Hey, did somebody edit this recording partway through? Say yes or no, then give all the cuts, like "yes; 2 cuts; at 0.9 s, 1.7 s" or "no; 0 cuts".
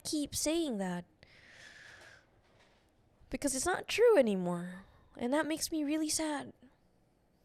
no; 0 cuts